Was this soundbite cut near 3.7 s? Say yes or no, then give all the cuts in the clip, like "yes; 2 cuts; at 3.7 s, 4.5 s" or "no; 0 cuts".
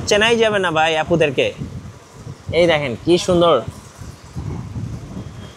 no; 0 cuts